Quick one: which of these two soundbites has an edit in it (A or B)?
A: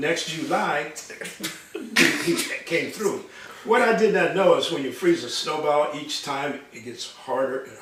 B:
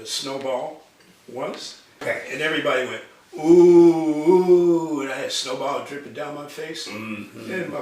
B